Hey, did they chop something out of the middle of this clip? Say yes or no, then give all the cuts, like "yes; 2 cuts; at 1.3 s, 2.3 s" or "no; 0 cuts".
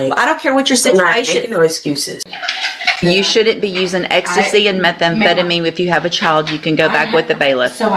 yes; 1 cut; at 2.3 s